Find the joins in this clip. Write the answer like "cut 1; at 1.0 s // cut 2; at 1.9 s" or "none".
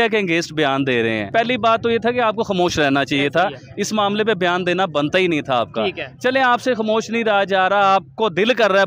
cut 1; at 1.3 s

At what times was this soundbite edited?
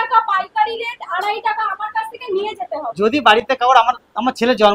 none

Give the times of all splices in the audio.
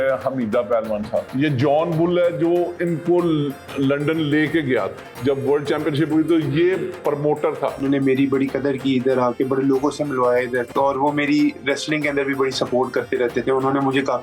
cut 1; at 1.3 s // cut 2; at 5.0 s // cut 3; at 7.8 s // cut 4; at 10.7 s

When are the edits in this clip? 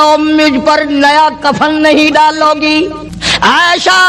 cut 1; at 2.8 s

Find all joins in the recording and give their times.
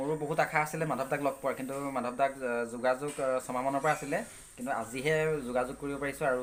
none

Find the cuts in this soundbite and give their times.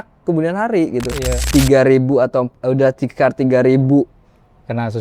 cut 1; at 1.4 s

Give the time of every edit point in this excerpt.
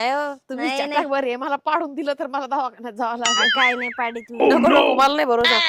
none

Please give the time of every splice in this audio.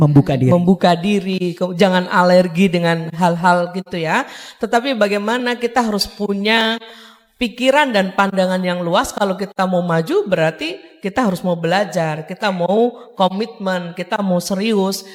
none

